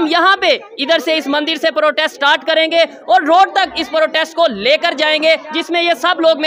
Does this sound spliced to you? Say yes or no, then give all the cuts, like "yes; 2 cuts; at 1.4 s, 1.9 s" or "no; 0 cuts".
no; 0 cuts